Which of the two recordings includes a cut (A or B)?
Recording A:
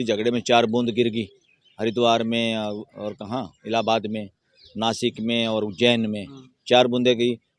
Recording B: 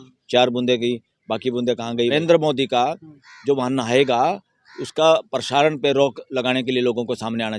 B